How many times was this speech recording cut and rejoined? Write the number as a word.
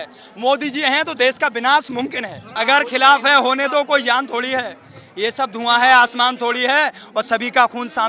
one